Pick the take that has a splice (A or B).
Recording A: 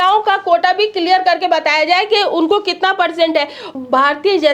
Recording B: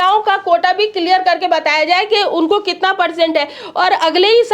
A